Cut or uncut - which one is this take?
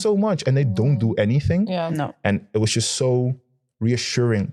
uncut